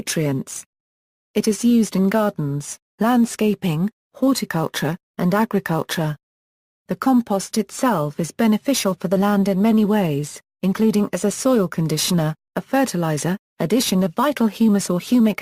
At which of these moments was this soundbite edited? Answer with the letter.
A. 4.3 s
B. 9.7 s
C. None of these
C